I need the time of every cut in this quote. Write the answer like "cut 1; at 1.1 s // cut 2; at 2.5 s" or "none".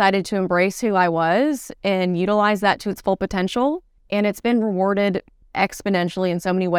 cut 1; at 3.9 s // cut 2; at 5.4 s